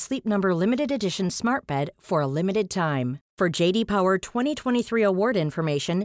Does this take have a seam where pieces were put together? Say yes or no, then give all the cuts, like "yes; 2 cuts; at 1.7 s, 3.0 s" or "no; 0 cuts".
no; 0 cuts